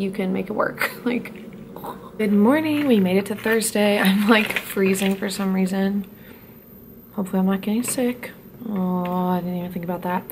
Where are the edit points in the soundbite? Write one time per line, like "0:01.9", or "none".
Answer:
none